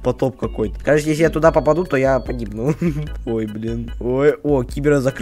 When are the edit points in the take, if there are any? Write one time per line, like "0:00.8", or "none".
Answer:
0:03.8

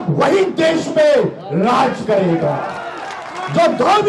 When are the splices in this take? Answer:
none

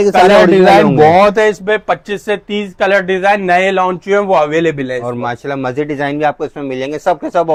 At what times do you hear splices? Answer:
none

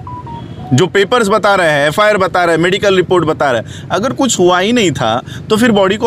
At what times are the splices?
none

